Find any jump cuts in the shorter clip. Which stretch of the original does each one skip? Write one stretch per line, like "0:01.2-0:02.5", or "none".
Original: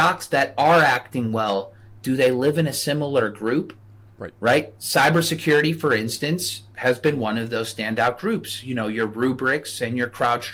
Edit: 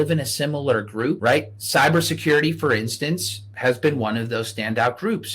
0:03.7-0:04.4